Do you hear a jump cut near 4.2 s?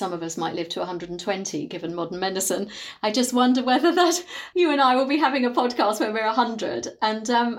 yes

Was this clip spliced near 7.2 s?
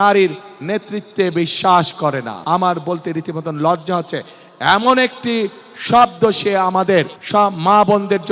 yes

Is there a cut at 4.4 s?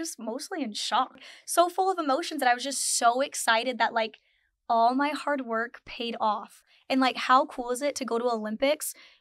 no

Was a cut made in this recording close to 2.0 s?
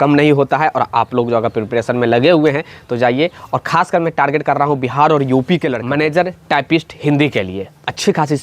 no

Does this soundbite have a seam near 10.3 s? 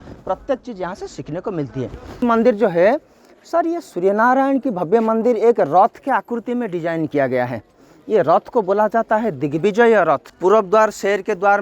yes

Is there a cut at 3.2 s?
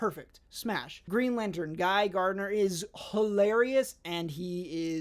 no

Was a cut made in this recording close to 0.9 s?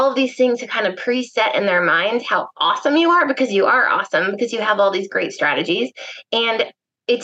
no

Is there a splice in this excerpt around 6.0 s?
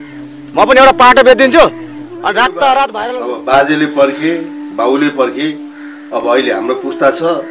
no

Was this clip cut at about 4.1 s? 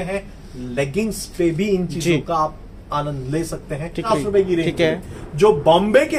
yes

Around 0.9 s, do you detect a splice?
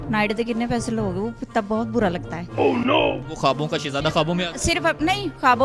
no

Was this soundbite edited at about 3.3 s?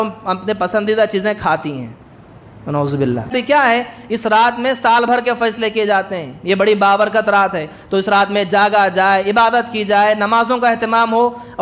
yes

